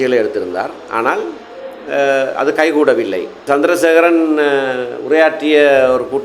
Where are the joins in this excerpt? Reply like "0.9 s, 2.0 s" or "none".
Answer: 3.4 s